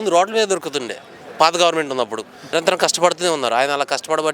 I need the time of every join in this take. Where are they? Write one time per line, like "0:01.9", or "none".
0:02.5